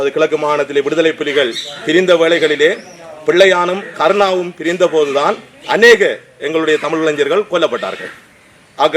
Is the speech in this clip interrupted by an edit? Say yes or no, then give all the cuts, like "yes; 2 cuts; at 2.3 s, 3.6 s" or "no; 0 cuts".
no; 0 cuts